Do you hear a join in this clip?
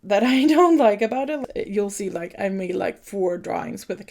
yes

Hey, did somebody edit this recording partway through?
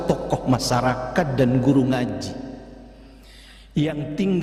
no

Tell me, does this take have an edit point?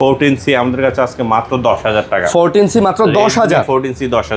no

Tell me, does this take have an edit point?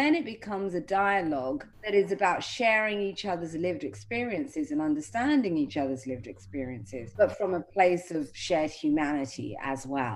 yes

